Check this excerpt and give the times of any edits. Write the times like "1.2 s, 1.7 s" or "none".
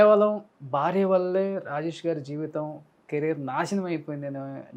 none

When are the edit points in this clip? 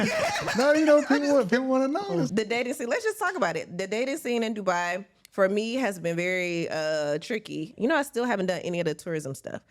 2.3 s, 7.7 s

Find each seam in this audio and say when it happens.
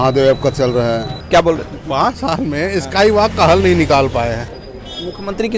1.3 s, 4.6 s

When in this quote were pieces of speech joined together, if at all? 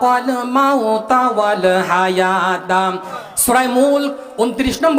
3.1 s

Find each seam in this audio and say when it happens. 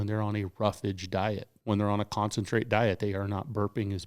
1.5 s

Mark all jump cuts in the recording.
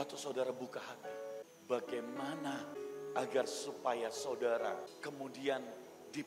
1.4 s, 2.7 s, 4.9 s

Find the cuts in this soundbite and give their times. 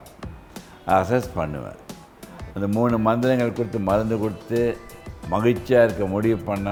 none

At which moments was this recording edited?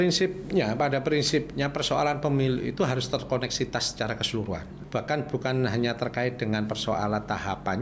4.7 s

